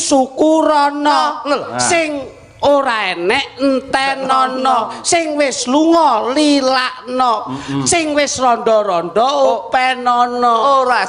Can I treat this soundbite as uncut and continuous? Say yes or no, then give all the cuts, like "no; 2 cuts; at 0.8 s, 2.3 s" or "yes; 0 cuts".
yes; 0 cuts